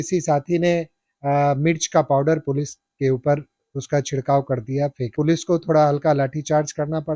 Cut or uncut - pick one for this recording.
cut